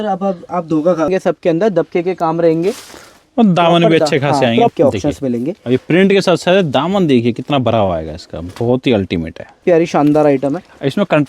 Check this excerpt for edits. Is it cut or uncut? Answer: cut